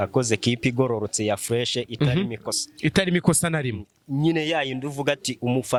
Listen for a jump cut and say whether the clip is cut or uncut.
uncut